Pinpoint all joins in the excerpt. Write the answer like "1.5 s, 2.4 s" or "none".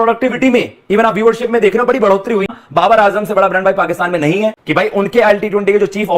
2.6 s, 4.6 s